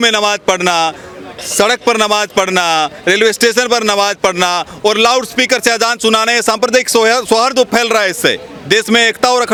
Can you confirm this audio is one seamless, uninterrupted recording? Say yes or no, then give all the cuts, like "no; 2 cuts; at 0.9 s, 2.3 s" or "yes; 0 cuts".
yes; 0 cuts